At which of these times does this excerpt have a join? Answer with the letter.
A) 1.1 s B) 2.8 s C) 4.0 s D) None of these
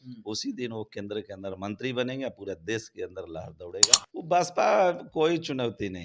C